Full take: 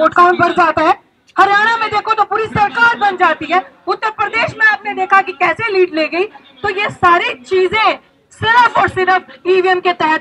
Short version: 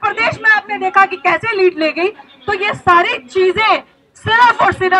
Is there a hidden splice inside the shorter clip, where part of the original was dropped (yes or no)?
no